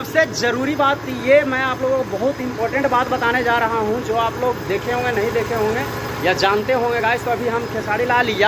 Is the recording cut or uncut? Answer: uncut